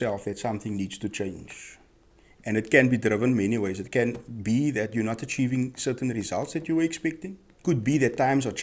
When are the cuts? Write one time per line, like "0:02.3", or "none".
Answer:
0:07.5